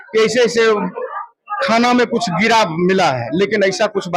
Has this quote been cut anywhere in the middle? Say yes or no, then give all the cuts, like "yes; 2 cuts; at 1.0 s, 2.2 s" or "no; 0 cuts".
no; 0 cuts